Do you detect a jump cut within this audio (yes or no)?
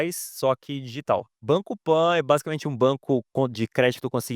yes